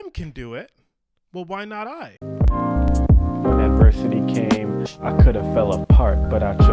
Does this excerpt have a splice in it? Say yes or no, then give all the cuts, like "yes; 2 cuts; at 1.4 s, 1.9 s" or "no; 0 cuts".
yes; 1 cut; at 2.2 s